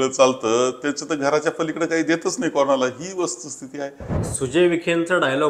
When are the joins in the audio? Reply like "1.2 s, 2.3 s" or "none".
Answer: 4.1 s